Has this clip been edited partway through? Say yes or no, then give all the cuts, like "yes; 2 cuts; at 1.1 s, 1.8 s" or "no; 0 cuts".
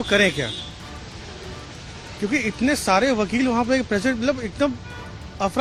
no; 0 cuts